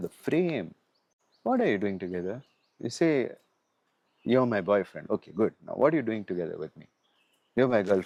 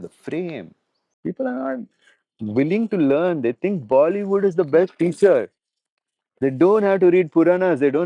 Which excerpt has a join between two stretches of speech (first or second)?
second